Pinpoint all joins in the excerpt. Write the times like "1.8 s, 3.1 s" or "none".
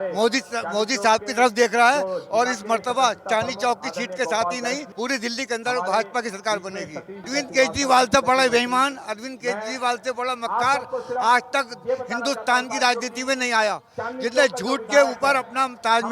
4.9 s, 7.3 s